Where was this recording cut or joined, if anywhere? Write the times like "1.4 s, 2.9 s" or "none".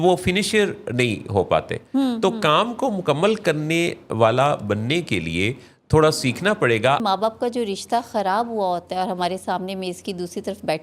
7.0 s